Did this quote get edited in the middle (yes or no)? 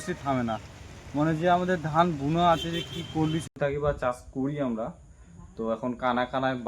yes